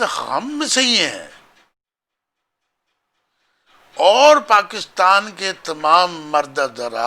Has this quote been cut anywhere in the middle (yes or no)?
no